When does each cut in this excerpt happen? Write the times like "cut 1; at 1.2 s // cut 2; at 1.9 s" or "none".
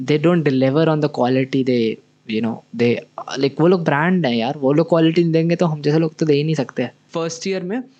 cut 1; at 7.0 s